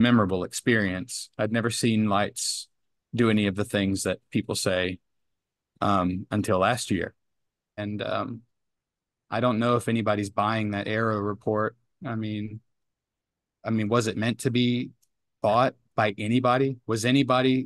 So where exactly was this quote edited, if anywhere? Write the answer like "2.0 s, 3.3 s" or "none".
7.8 s